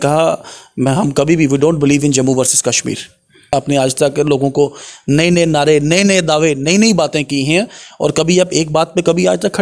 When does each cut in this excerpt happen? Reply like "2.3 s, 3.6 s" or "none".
3.5 s